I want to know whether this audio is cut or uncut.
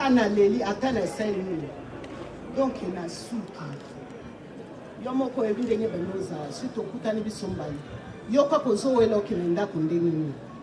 uncut